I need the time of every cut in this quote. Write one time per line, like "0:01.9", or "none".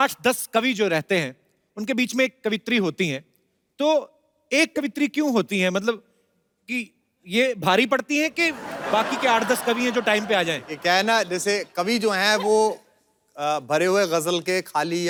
none